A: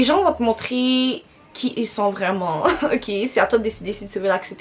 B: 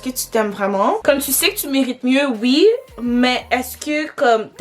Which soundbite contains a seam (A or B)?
B